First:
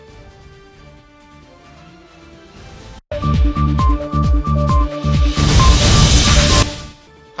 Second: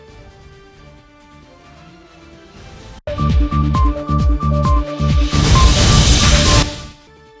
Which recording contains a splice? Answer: second; 2 cuts; at 3.0 s, 6.6 s

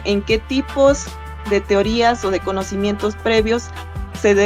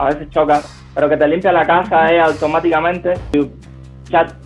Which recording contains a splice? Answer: second; 1 cut; at 3.3 s

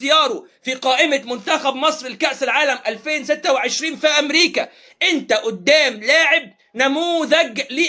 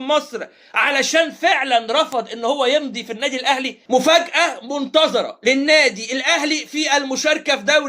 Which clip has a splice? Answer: second; 1 cut; at 3.7 s

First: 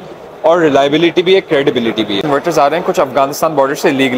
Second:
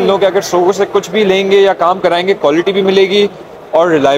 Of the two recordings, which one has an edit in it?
first; 1 cut; at 2.3 s

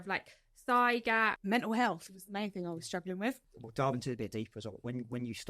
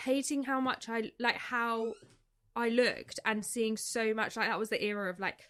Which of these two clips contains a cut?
first; 2 cuts; at 1.4 s, 3.5 s

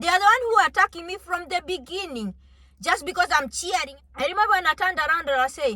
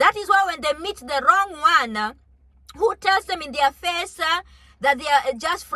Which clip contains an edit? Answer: first; 1 cut; at 3.9 s

